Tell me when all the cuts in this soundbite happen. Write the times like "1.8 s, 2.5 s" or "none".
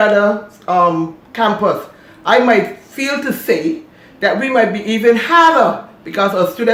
none